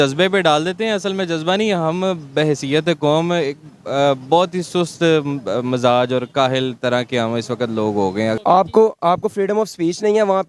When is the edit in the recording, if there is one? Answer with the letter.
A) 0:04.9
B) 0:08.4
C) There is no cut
B